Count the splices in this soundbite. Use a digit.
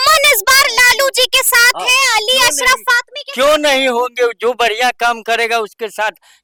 0